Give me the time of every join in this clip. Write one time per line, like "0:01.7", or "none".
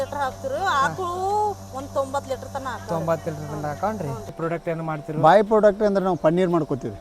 0:04.4